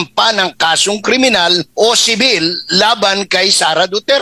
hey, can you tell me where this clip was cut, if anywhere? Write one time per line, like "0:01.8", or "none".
0:01.7